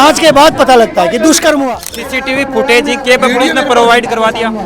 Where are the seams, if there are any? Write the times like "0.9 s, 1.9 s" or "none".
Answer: 2.1 s